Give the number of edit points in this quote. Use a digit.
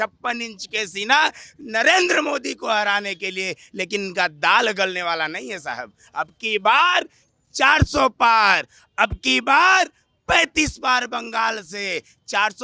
0